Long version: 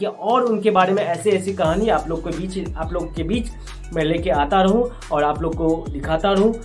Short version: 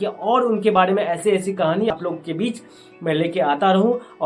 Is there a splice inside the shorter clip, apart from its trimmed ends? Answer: yes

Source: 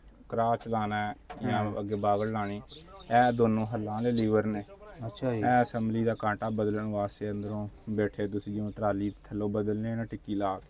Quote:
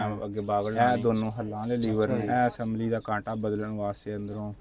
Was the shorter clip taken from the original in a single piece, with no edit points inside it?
no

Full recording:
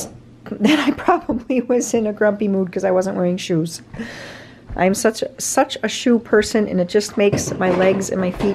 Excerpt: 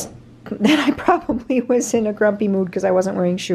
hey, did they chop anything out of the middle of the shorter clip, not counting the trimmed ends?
no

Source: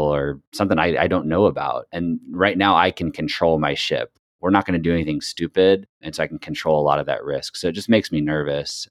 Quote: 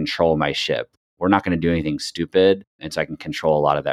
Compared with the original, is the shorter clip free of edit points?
yes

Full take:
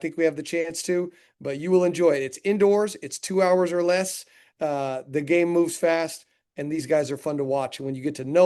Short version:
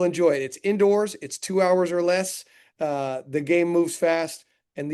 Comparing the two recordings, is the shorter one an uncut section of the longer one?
yes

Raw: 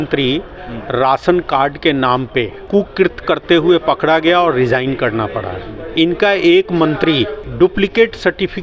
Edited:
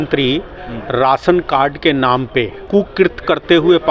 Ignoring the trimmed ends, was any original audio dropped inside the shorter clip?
no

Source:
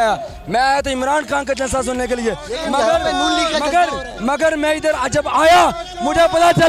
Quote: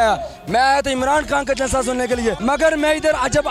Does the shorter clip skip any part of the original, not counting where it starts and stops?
yes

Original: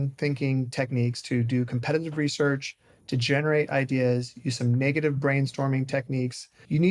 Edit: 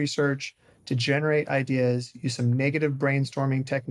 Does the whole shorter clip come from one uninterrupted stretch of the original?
yes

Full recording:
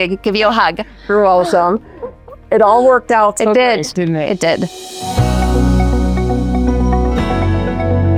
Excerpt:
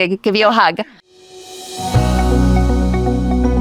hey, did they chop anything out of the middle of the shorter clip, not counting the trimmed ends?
yes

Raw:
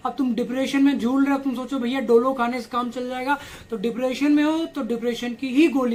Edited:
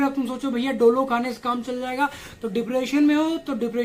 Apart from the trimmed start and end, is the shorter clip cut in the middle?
no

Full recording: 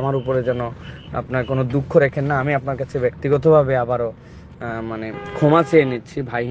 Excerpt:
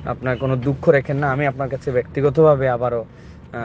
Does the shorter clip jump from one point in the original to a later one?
no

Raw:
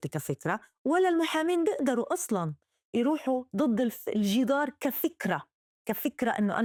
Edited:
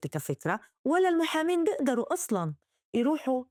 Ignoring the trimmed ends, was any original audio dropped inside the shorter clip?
no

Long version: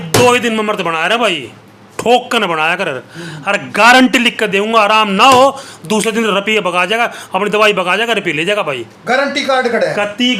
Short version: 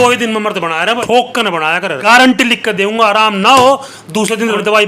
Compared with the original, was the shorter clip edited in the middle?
yes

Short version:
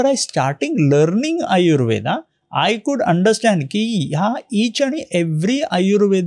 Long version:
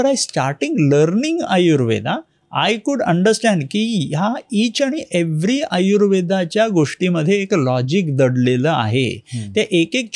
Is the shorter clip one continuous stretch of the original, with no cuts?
yes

